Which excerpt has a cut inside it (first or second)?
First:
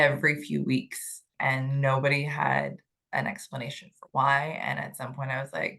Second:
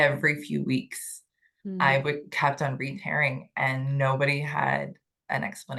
first